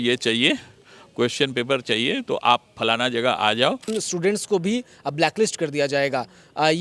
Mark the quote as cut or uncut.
cut